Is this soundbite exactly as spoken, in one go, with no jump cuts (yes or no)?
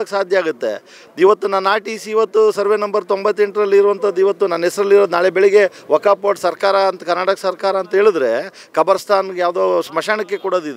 yes